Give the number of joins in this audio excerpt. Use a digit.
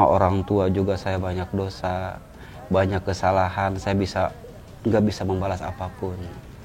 0